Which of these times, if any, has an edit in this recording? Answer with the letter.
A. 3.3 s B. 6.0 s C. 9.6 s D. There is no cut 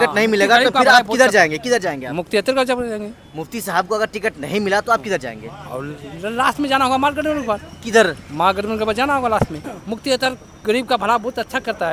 D